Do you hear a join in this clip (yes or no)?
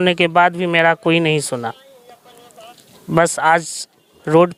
no